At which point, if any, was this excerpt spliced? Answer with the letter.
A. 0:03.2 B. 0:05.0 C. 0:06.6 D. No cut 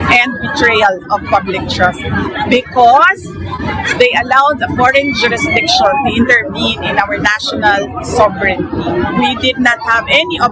D